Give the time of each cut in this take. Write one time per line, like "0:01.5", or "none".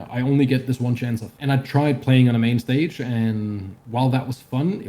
0:01.3